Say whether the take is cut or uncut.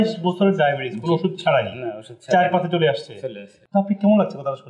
uncut